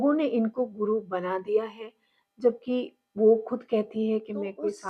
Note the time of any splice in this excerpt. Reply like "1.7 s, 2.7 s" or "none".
none